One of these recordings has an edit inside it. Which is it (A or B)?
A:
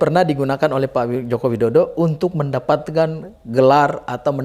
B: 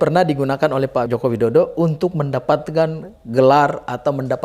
B